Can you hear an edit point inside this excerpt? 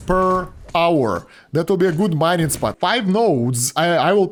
no; 0 cuts

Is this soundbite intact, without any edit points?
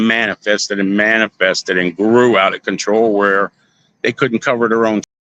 yes; 0 cuts

